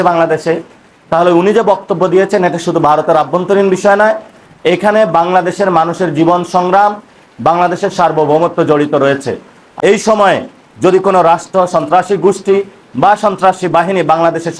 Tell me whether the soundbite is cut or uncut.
cut